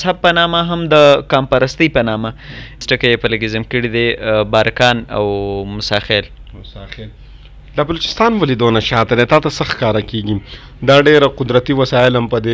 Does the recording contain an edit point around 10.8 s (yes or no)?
no